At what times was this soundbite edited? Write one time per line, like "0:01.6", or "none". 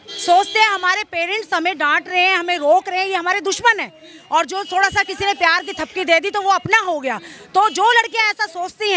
none